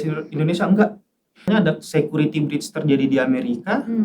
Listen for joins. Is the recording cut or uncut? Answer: cut